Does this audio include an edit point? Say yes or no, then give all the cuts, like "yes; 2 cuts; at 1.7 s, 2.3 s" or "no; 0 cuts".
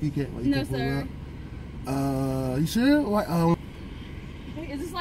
yes; 1 cut; at 3.5 s